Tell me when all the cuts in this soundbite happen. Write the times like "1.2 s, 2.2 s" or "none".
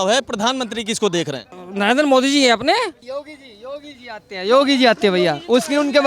1.5 s, 3.0 s